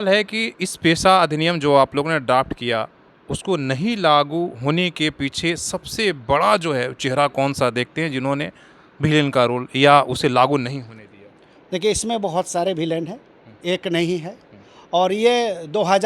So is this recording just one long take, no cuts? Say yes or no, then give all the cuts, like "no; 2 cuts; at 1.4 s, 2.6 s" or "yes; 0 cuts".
yes; 0 cuts